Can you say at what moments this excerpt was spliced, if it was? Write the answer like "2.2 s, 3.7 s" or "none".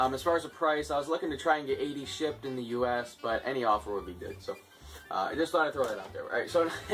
none